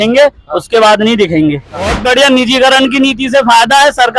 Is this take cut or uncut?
cut